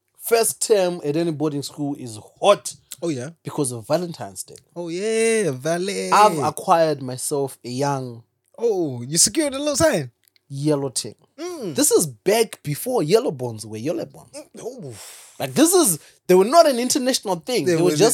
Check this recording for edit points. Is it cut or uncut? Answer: uncut